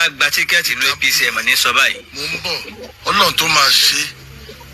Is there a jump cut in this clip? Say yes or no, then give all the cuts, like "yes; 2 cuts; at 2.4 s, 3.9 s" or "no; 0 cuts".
no; 0 cuts